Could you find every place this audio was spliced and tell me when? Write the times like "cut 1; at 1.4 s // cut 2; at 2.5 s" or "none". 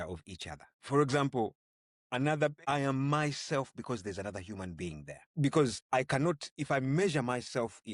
cut 1; at 0.8 s // cut 2; at 2.6 s // cut 3; at 5.2 s // cut 4; at 5.8 s